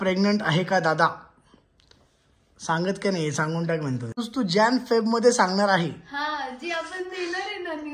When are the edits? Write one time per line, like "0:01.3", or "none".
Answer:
0:04.3